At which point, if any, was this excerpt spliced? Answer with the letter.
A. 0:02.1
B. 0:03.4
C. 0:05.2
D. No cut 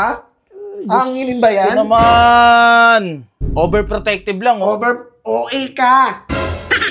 B